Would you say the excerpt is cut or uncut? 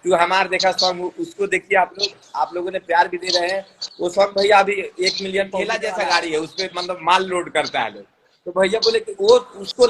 cut